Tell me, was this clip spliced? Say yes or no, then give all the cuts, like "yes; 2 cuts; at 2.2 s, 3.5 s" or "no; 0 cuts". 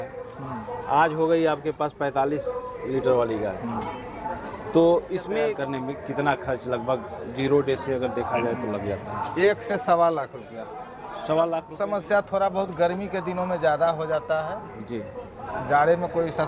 yes; 2 cuts; at 5.6 s, 11.8 s